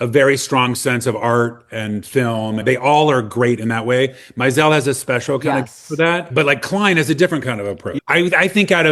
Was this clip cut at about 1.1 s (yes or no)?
no